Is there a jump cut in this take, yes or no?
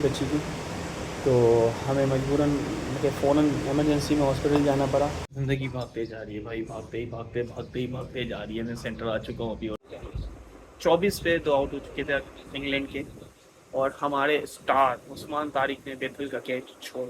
yes